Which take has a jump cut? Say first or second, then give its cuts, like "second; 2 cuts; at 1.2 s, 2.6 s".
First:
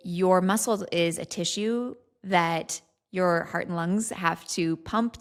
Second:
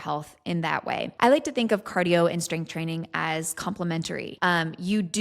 second; 2 cuts; at 1.1 s, 4.3 s